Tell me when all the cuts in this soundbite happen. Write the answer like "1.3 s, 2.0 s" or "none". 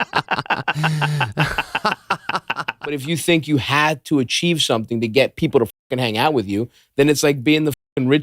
3.0 s